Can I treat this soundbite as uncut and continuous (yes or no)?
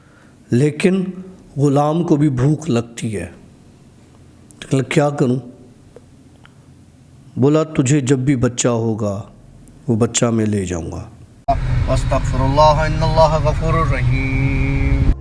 no